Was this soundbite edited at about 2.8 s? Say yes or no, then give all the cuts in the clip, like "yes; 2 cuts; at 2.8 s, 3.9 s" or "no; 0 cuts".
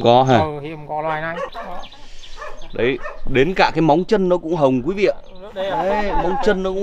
no; 1 cut; at 1.5 s